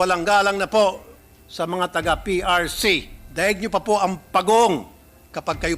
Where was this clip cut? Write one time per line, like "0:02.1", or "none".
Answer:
0:03.2